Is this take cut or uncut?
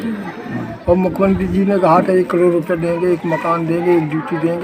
uncut